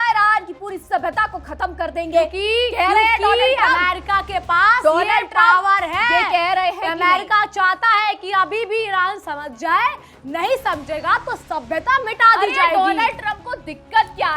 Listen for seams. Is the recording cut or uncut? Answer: uncut